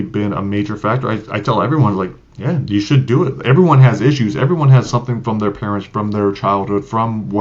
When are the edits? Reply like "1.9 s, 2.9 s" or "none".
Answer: none